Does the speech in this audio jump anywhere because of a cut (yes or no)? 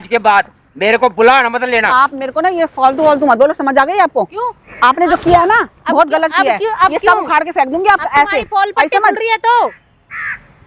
no